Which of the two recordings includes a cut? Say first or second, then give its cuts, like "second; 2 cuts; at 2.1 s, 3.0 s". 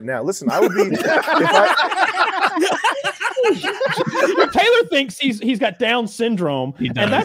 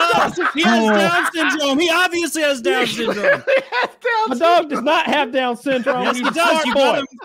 first; 1 cut; at 4.5 s